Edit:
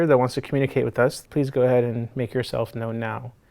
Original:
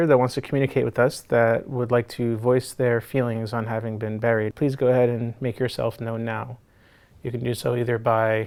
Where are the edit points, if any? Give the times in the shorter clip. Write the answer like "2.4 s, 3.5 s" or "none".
1.2 s